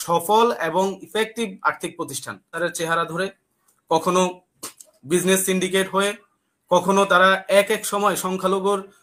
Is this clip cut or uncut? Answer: cut